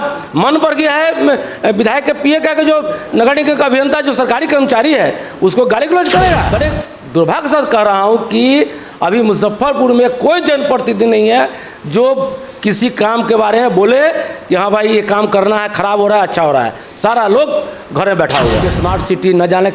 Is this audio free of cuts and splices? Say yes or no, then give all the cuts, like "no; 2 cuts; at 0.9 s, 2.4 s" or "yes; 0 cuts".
no; 2 cuts; at 6.5 s, 18.7 s